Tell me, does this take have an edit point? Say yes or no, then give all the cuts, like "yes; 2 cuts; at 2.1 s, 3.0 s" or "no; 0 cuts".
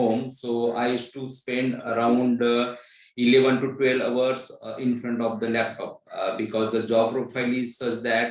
no; 0 cuts